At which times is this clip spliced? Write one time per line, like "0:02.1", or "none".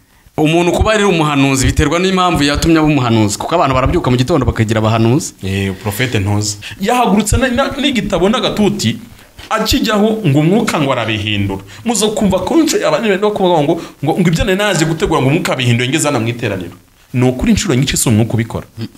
0:06.5